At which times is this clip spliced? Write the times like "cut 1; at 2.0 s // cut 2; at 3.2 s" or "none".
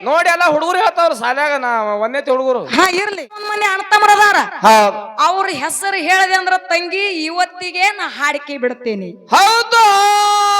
cut 1; at 3.4 s